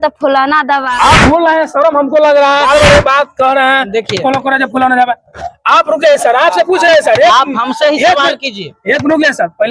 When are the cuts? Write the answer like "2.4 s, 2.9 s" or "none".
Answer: 0.9 s, 2.6 s